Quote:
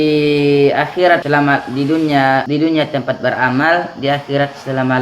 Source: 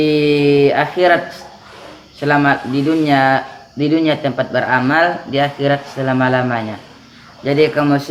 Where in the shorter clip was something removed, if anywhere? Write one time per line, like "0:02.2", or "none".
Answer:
0:01.2
0:02.5